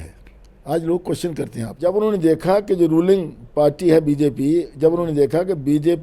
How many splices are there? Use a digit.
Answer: 1